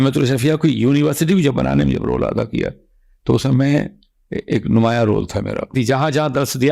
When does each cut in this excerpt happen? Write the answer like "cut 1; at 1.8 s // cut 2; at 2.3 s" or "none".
cut 1; at 5.7 s